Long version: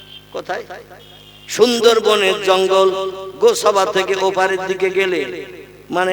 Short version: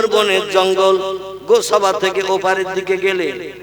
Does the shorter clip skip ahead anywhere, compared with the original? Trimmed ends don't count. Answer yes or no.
no